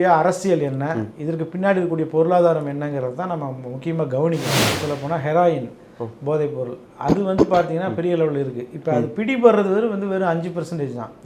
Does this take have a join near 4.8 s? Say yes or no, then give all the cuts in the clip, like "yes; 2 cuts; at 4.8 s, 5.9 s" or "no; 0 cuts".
yes; 1 cut; at 4.8 s